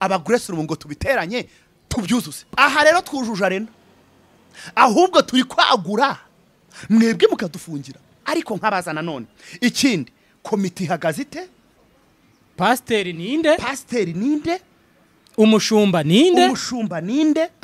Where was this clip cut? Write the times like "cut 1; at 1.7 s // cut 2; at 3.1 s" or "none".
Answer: cut 1; at 2.6 s // cut 2; at 8.1 s